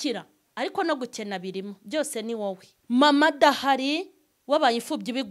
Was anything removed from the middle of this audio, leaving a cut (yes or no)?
yes